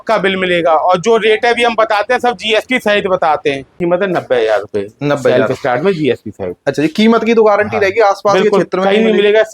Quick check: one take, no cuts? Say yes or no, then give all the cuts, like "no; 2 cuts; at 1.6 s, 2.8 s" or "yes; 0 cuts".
no; 1 cut; at 3.7 s